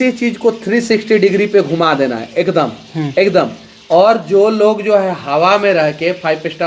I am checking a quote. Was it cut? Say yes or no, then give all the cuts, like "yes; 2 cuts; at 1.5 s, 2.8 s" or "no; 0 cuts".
no; 0 cuts